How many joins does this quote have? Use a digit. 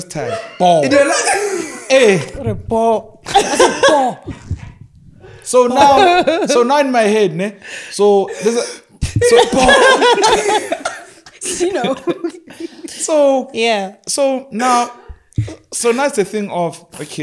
0